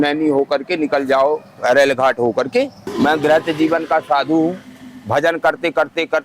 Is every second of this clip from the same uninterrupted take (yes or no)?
no